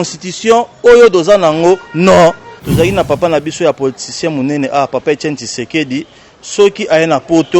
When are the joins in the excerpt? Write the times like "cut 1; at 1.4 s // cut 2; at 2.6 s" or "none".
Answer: cut 1; at 2.5 s